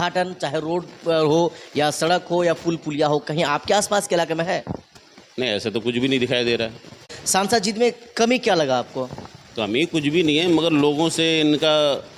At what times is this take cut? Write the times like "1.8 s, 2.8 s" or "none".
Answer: 7.1 s